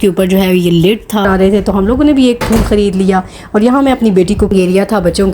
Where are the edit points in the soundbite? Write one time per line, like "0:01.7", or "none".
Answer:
0:01.3
0:04.5